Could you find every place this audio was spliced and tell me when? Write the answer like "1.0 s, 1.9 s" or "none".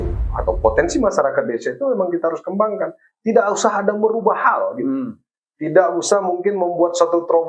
none